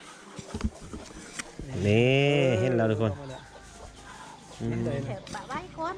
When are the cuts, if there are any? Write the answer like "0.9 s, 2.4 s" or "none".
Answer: none

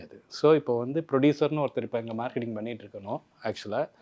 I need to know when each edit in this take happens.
none

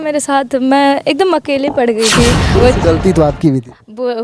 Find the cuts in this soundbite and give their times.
2.5 s

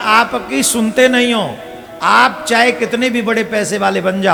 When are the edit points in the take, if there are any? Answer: none

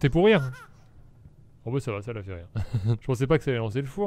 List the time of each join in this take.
3.0 s

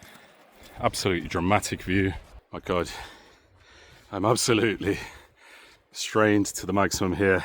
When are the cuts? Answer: 2.3 s

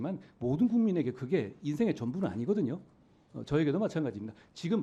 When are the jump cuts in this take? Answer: none

